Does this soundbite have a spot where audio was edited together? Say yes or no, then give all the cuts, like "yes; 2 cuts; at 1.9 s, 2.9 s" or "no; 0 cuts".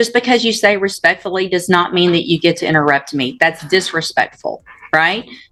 no; 0 cuts